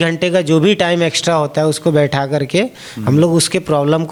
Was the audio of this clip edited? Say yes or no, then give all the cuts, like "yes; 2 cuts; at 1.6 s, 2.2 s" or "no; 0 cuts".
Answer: no; 0 cuts